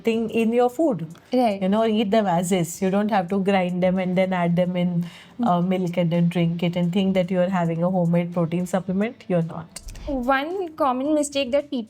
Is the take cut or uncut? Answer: cut